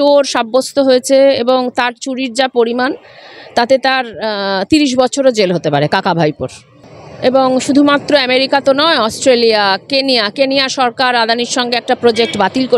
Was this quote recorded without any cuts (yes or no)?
yes